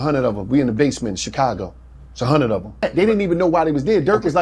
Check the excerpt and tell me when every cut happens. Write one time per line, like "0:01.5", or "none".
0:02.9